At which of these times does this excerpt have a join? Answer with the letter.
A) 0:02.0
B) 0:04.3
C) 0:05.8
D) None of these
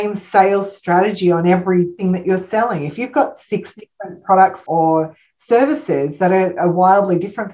A